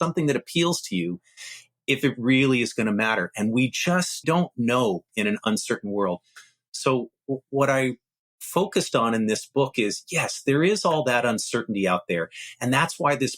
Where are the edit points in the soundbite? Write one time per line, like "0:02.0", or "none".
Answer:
0:04.2
0:05.1